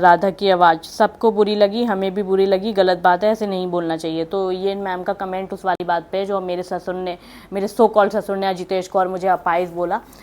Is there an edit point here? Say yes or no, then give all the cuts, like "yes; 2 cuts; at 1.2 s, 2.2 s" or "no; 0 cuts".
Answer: no; 0 cuts